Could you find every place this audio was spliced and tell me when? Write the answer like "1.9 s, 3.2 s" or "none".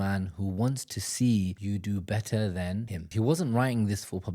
1.6 s, 3.1 s